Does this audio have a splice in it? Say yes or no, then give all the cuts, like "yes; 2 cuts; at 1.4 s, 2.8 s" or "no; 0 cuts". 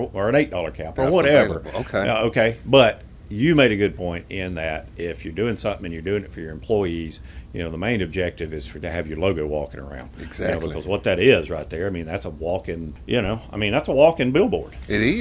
yes; 1 cut; at 12.9 s